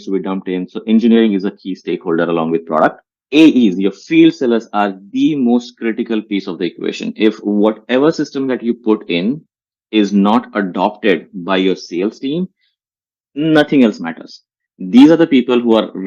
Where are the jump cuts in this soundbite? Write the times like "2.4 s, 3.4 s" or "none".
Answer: none